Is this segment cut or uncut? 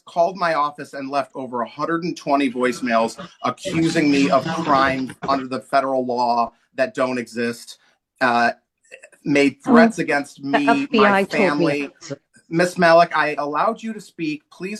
uncut